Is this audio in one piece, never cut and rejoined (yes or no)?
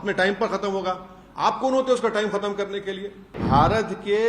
no